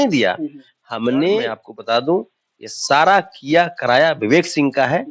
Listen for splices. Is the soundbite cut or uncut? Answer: cut